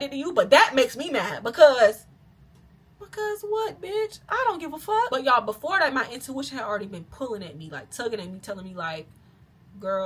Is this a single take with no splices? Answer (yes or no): no